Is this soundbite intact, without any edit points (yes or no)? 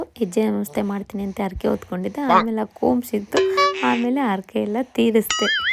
yes